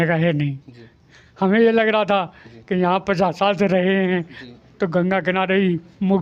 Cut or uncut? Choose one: uncut